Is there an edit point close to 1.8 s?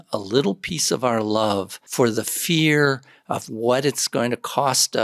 yes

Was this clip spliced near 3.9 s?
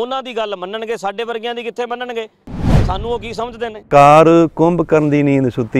yes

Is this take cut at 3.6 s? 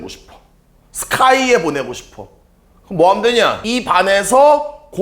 yes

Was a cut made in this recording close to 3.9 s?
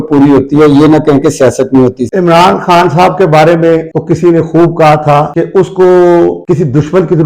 yes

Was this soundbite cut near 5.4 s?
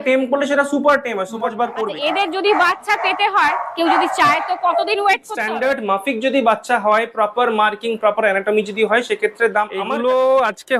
yes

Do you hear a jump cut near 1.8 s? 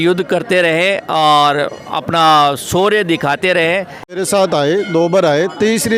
no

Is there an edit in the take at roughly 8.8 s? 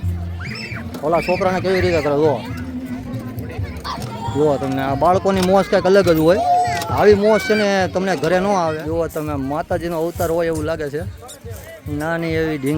yes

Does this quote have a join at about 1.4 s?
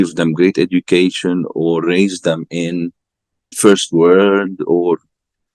no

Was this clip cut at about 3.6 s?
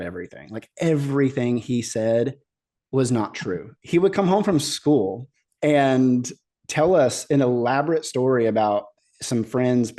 yes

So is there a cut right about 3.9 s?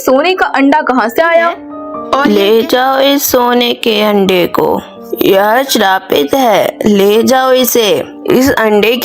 no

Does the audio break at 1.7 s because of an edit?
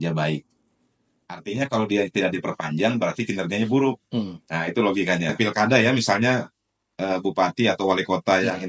no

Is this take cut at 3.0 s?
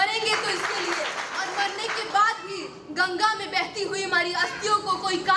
no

